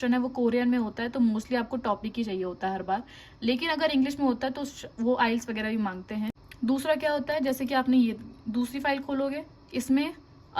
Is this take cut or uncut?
uncut